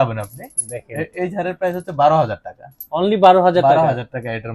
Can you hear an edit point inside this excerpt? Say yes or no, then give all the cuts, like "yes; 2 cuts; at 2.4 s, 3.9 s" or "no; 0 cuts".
no; 0 cuts